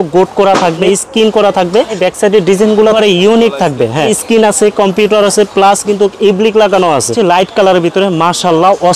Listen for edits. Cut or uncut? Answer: cut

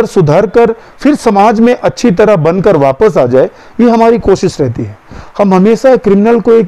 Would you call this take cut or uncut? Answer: uncut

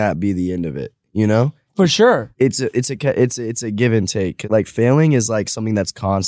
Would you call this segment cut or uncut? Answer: cut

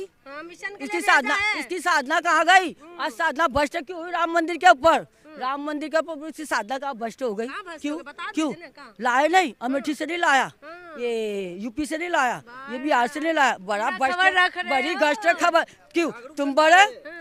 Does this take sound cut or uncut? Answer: uncut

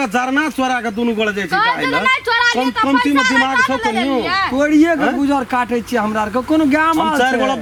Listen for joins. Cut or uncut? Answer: uncut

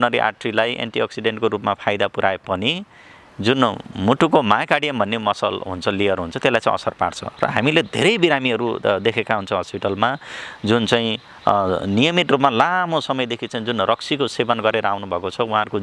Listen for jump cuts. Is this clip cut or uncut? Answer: uncut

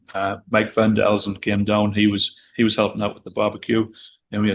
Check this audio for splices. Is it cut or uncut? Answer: uncut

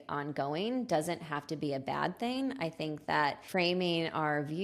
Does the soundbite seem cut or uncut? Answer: cut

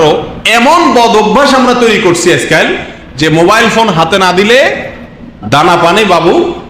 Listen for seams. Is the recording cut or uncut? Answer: uncut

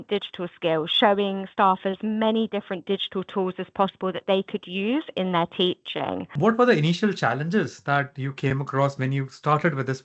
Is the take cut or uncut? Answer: cut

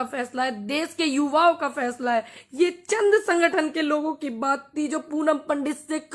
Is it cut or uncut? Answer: cut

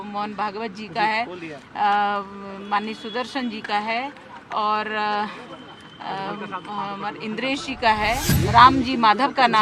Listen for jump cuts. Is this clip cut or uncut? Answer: uncut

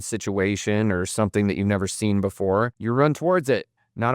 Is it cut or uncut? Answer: cut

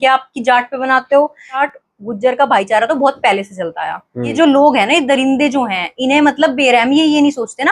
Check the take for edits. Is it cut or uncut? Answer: cut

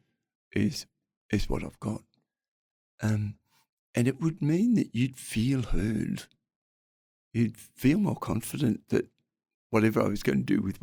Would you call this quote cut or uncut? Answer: uncut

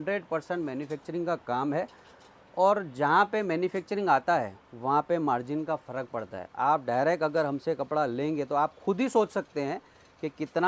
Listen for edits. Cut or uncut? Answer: uncut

